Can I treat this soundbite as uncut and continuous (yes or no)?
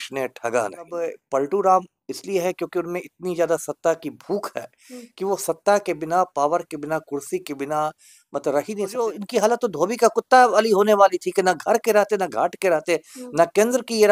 no